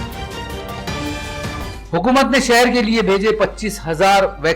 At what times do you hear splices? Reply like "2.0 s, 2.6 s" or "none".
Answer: 1.8 s